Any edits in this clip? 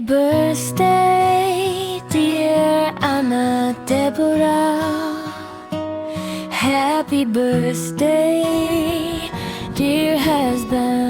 no; 0 cuts

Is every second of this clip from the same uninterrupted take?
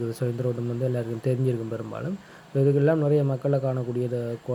yes; 0 cuts

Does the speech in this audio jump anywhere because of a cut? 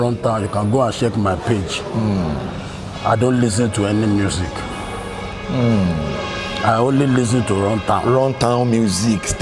no; 0 cuts

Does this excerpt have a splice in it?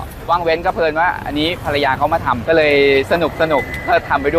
no; 0 cuts

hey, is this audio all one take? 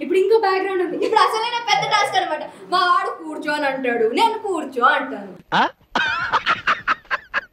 yes; 0 cuts

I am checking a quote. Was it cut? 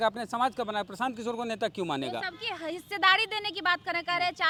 no; 0 cuts

